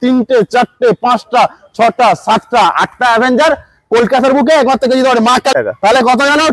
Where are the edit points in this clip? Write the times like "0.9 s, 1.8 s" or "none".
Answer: 5.5 s